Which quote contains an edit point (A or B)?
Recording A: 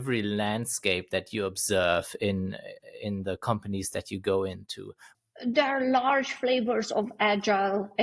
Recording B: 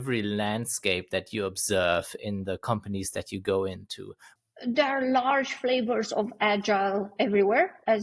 B